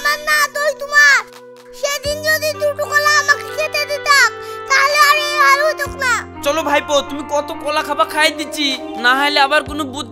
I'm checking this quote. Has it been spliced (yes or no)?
no